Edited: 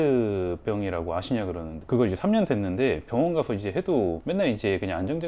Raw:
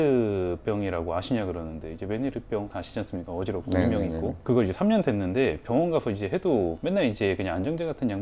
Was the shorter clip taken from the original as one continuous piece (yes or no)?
no